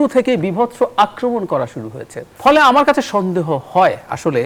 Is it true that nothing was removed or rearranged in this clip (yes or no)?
yes